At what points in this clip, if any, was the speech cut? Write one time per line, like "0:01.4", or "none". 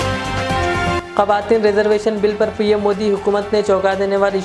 none

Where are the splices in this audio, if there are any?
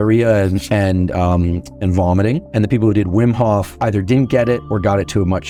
none

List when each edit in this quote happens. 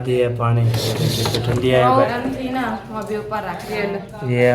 0:02.1

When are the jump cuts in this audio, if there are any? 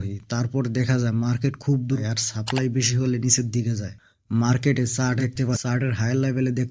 0:02.0
0:05.2

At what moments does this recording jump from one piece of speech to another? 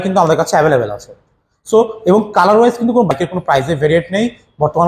0:03.1

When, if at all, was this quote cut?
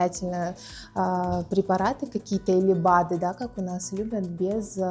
none

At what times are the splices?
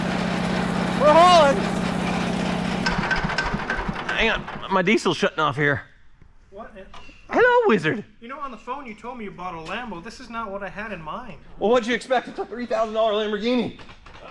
0:02.8

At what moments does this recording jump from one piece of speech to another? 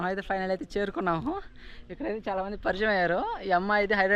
none

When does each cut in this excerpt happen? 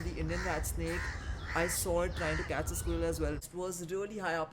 0:03.4

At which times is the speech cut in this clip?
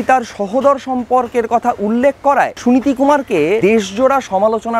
0:02.5
0:03.6

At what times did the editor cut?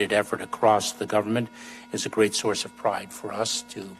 none

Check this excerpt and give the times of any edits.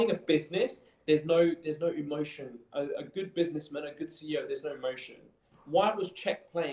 none

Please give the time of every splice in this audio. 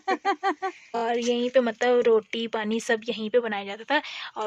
0:01.0

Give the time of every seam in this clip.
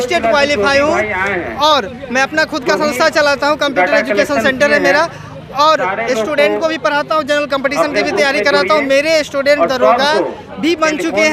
none

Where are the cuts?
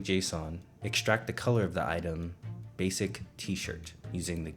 none

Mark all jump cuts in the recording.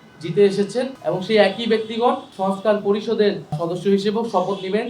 0:01.0
0:02.3
0:03.6

